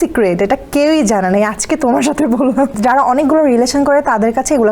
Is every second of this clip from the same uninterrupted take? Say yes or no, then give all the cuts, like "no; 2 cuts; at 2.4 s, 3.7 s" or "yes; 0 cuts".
no; 1 cut; at 2.7 s